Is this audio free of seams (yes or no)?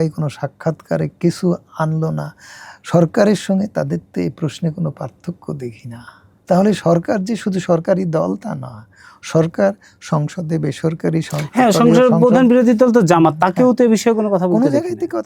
yes